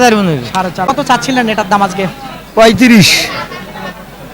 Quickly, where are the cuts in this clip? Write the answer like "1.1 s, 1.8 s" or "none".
0.9 s